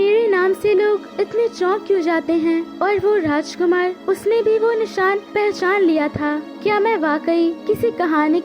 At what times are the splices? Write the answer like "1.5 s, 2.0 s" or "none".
1.1 s, 2.7 s, 4.0 s, 5.3 s, 6.5 s, 7.6 s